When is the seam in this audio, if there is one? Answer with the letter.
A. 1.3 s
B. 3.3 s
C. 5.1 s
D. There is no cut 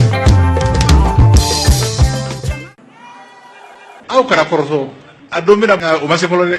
B